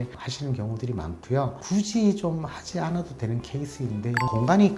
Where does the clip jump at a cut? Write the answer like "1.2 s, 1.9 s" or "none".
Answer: 1.5 s